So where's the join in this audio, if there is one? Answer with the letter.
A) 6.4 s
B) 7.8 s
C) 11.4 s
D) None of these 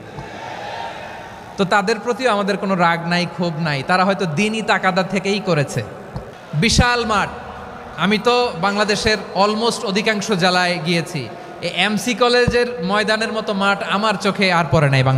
A